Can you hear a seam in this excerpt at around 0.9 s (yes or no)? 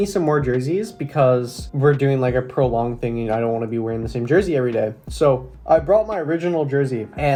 no